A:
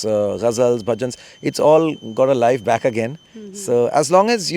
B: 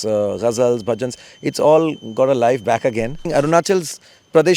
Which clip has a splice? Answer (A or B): B